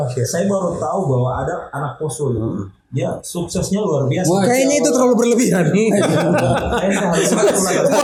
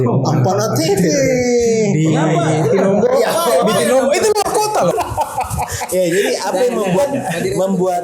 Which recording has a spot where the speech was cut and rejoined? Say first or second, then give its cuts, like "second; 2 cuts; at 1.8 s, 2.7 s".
second; 1 cut; at 4.9 s